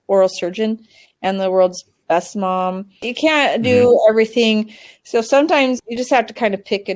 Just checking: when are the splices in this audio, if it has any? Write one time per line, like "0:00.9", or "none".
0:03.1
0:05.8